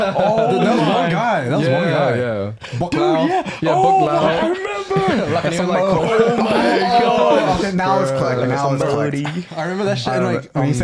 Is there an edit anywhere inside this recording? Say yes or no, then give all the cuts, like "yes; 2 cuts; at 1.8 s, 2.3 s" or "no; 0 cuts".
no; 0 cuts